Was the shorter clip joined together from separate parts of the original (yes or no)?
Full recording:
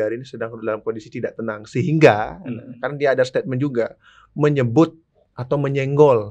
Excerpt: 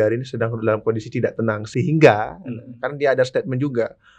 no